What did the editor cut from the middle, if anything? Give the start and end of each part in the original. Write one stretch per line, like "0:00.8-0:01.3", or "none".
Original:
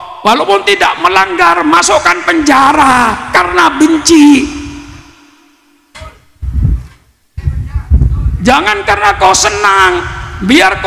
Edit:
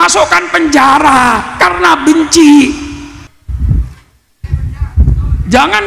0:05.1-0:06.3